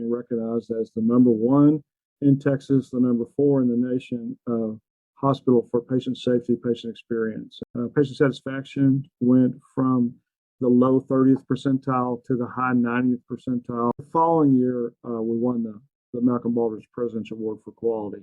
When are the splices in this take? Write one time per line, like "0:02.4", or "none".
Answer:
0:07.6
0:14.1